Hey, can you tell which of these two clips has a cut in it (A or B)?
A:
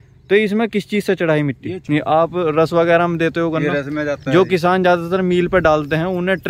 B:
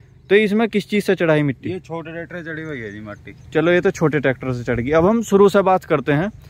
A